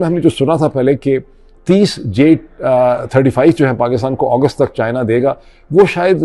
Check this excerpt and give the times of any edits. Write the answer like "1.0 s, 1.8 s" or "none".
none